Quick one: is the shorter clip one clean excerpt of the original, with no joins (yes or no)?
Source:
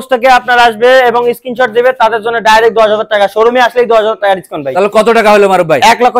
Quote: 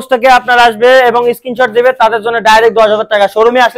yes